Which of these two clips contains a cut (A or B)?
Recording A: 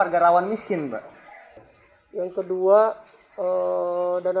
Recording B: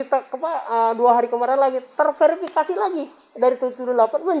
A